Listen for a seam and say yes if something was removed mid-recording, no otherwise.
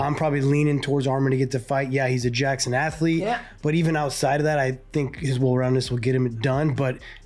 no